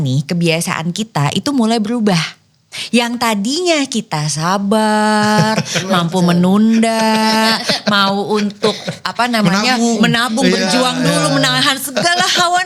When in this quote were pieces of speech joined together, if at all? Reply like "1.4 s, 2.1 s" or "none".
none